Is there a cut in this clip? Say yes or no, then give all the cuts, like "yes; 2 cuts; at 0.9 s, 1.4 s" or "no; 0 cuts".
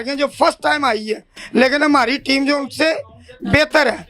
no; 0 cuts